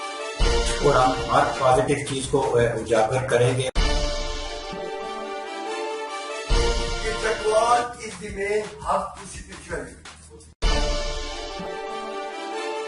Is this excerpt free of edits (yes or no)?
no